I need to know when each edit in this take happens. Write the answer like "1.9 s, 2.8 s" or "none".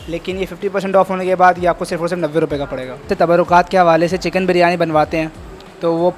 3.1 s